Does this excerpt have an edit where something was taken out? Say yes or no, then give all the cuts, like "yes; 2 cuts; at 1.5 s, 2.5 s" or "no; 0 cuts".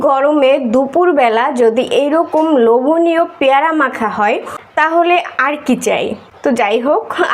yes; 1 cut; at 6.3 s